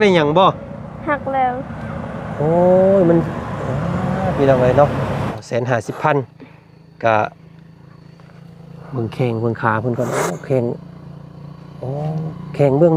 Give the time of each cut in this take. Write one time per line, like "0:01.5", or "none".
0:05.3